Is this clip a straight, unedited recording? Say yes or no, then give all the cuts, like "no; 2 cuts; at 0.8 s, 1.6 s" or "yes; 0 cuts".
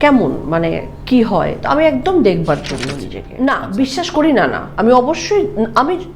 no; 1 cut; at 3.2 s